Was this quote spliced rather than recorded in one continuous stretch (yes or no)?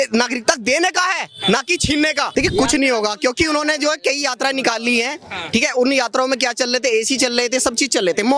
yes